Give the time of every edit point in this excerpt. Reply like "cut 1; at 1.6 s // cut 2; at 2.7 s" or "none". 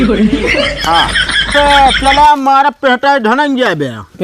cut 1; at 1.5 s